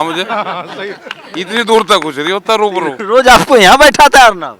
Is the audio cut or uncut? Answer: uncut